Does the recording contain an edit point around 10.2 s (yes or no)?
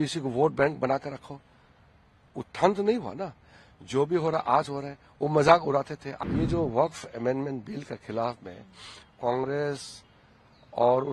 no